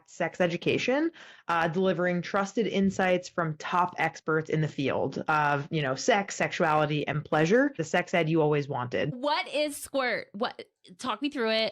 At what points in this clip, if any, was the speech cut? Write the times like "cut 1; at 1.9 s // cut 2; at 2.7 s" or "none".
cut 1; at 7.8 s // cut 2; at 9.1 s

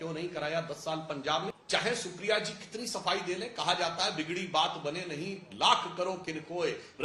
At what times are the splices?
cut 1; at 1.5 s

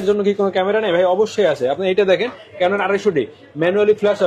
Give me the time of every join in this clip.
none

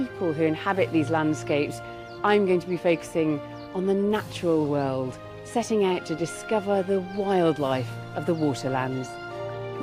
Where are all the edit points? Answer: cut 1; at 1.7 s

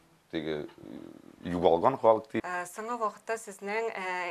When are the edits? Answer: cut 1; at 2.4 s

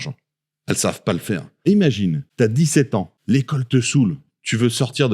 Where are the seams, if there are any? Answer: cut 1; at 1.7 s // cut 2; at 2.2 s // cut 3; at 3.1 s

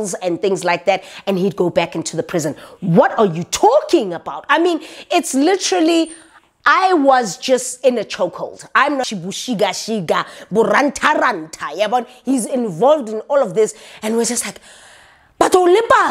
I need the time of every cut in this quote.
cut 1; at 9.1 s

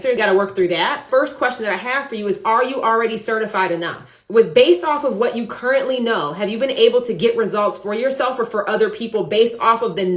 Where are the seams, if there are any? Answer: cut 1; at 1.0 s

